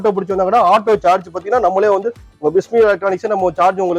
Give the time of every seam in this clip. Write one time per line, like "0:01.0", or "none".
none